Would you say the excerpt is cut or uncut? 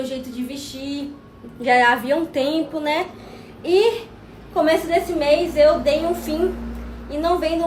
uncut